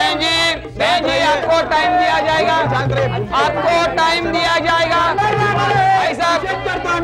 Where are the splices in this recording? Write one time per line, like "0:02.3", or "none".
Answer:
none